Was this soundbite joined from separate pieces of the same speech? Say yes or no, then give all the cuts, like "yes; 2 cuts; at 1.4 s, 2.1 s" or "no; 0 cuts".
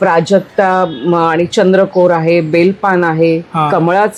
no; 0 cuts